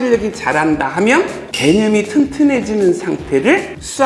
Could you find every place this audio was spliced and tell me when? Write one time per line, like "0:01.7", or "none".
none